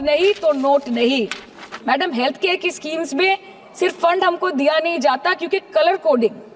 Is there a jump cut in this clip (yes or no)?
no